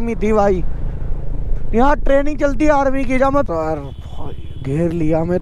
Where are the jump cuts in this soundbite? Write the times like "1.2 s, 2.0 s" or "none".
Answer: 3.5 s